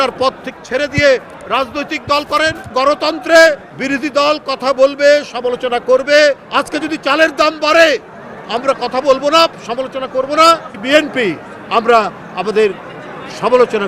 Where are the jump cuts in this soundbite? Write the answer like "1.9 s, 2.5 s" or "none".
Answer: 2.7 s, 3.7 s, 6.4 s, 10.7 s